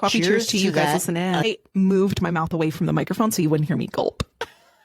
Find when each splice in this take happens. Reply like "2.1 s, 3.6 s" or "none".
1.4 s

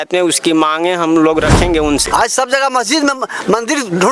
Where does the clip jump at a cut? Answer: 2.1 s

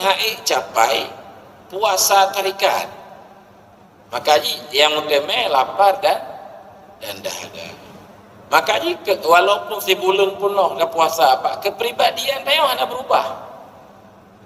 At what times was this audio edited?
none

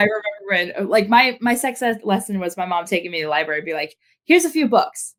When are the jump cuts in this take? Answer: none

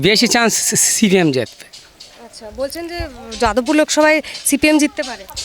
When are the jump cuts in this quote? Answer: none

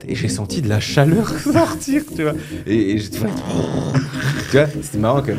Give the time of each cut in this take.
none

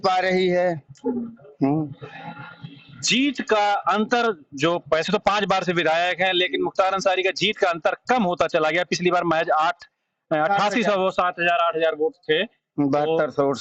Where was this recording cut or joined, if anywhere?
none

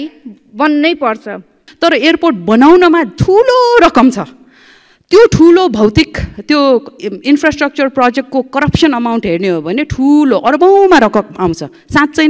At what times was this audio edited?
1.6 s

